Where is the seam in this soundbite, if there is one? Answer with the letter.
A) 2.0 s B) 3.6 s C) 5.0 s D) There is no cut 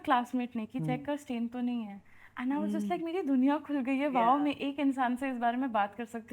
D